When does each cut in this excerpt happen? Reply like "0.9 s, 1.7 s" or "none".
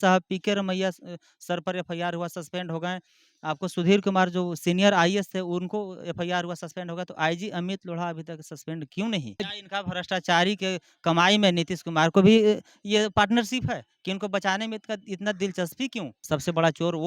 9.4 s, 16.2 s